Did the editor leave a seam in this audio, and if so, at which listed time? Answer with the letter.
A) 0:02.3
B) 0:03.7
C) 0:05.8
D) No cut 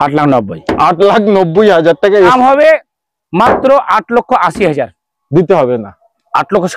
A